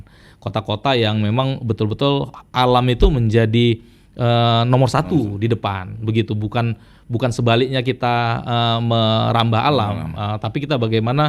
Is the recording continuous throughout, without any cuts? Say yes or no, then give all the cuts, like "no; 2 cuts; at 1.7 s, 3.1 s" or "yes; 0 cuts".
yes; 0 cuts